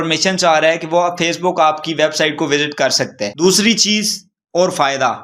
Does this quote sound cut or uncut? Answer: uncut